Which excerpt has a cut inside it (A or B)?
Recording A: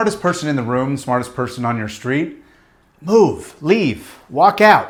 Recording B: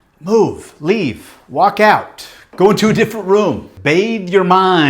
B